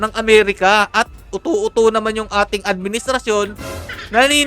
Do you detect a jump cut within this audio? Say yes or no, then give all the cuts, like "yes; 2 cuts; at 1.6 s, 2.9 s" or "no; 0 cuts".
no; 0 cuts